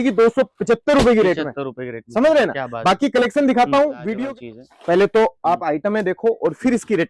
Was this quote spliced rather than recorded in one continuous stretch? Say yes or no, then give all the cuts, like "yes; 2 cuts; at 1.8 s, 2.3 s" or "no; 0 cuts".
yes; 1 cut; at 4.0 s